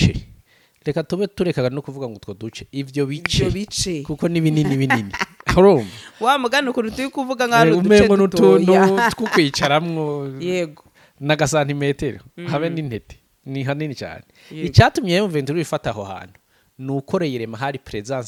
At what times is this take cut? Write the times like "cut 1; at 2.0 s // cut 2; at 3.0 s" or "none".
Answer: none

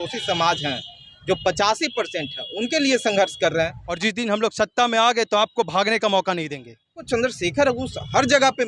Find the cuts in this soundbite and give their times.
cut 1; at 3.9 s // cut 2; at 7.0 s

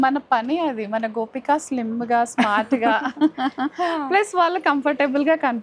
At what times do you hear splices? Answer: none

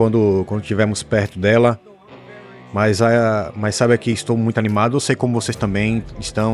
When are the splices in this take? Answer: none

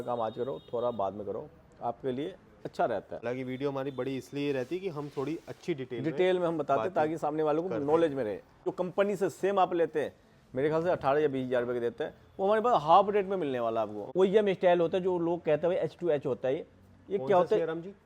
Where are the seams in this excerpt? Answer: cut 1; at 3.2 s // cut 2; at 8.7 s // cut 3; at 14.0 s

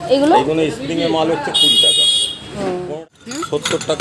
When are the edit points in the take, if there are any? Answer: cut 1; at 3.0 s

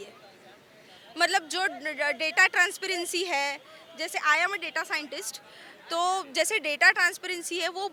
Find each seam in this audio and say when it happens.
none

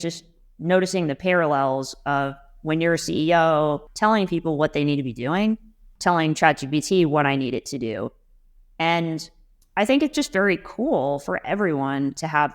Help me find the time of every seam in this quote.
cut 1; at 3.9 s // cut 2; at 5.9 s

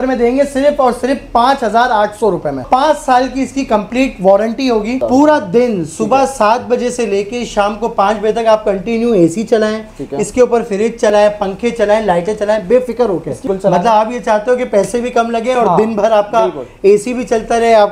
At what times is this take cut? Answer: cut 1; at 2.6 s // cut 2; at 5.0 s // cut 3; at 13.4 s

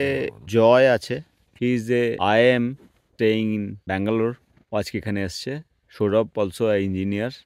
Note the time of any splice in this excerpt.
cut 1; at 3.0 s

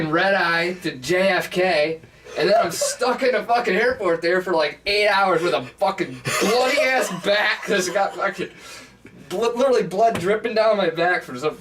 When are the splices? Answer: none

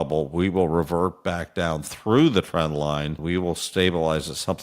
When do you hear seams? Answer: cut 1; at 3.2 s

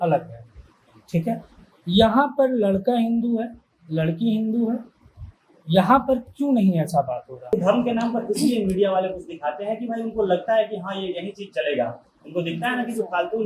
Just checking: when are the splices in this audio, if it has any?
cut 1; at 7.4 s

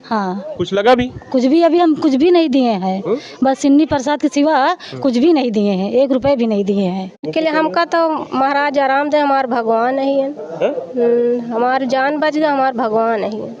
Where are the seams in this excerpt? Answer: cut 1; at 7.3 s

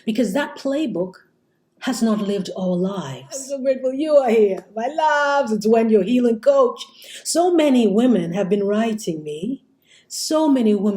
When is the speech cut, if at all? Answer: cut 1; at 3.5 s

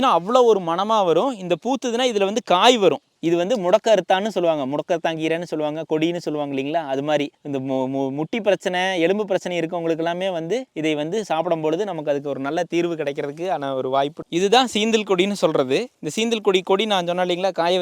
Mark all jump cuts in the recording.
cut 1; at 3.1 s

